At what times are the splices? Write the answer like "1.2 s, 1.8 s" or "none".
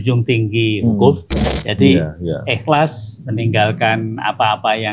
1.4 s